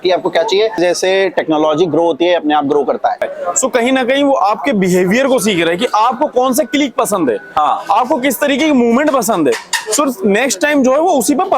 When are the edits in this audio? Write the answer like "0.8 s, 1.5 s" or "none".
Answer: 0.8 s, 3.3 s